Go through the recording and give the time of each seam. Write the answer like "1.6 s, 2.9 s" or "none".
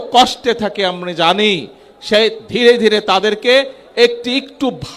none